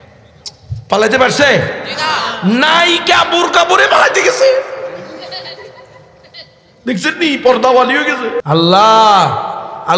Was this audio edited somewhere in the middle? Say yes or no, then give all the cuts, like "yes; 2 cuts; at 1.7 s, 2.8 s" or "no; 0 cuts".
yes; 1 cut; at 8.4 s